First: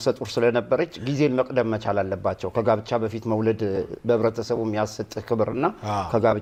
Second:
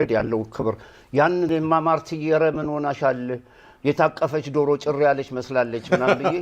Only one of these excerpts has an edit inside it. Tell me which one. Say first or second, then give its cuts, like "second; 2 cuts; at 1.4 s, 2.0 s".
second; 1 cut; at 1.5 s